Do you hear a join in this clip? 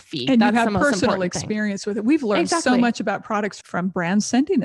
yes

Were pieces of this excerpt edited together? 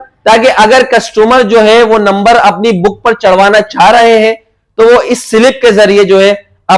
no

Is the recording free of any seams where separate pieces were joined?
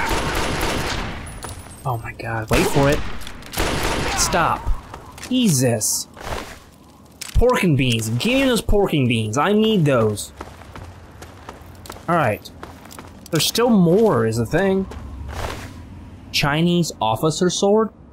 yes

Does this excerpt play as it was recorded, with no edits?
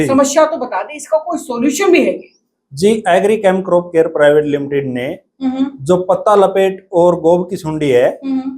yes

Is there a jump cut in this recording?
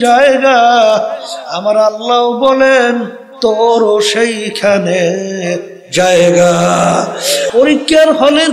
yes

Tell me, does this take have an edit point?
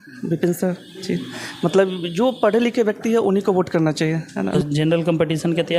yes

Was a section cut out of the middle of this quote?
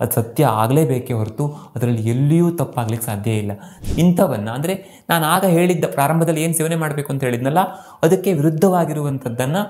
yes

